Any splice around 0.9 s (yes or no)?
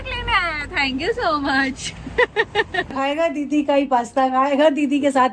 no